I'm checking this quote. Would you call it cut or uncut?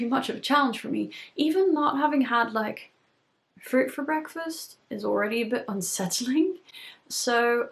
uncut